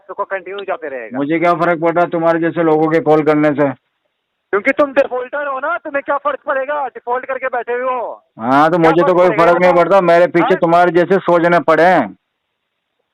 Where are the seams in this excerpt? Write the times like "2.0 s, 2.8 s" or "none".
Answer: none